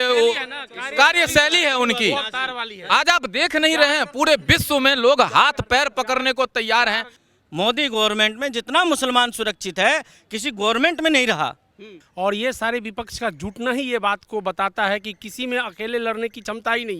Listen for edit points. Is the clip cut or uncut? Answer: cut